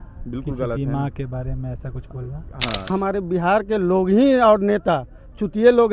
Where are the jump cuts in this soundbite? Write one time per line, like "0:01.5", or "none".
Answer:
0:02.9

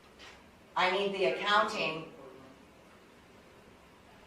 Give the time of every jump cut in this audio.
none

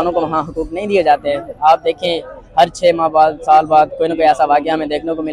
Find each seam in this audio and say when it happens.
none

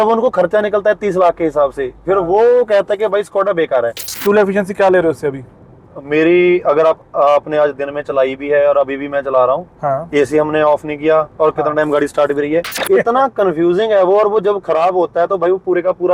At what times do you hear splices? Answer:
0:04.2
0:12.9

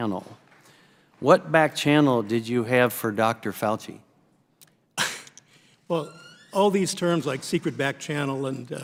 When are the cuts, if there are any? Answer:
none

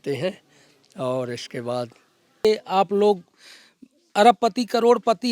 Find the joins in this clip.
0:02.4

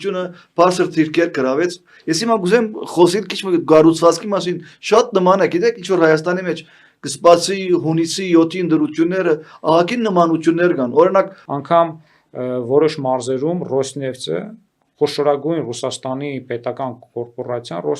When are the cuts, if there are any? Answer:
0:11.4

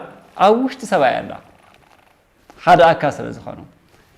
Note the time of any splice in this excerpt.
none

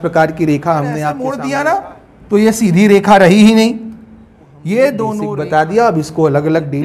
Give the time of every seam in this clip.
0:01.2
0:05.2

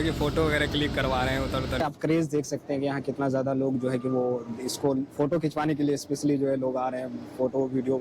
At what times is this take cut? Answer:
0:01.8

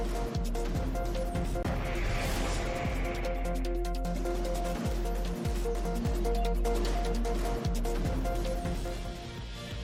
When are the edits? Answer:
none

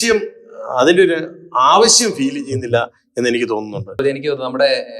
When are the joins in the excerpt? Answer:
0:04.0

